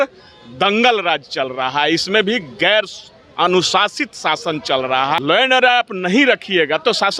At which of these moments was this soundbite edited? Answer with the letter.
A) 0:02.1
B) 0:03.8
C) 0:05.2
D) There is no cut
C